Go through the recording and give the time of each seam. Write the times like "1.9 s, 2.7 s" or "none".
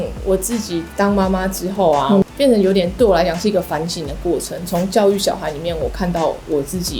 2.2 s